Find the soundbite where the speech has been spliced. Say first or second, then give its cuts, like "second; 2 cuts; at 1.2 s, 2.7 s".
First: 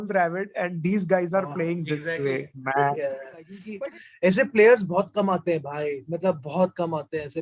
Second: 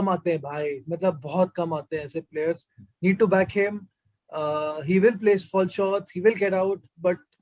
first; 1 cut; at 3.6 s